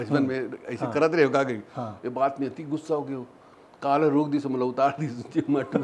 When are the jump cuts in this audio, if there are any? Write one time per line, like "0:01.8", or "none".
none